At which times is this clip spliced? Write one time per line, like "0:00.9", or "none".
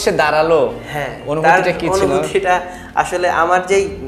none